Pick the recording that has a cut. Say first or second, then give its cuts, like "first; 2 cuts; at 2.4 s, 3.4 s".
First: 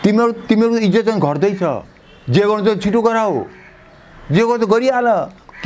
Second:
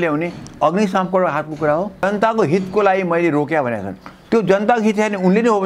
second; 1 cut; at 2.0 s